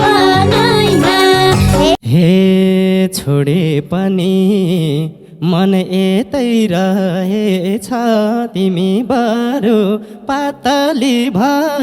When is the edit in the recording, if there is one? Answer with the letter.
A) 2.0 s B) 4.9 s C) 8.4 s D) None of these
A